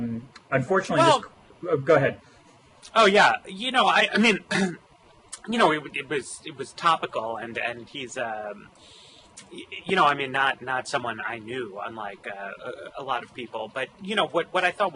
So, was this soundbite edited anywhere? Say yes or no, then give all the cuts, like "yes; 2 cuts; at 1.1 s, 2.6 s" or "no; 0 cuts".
no; 0 cuts